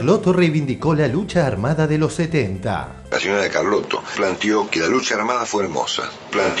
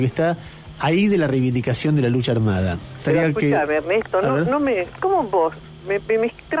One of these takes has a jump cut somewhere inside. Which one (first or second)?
first